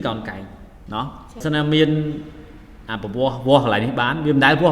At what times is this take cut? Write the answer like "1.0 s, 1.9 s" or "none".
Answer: 1.3 s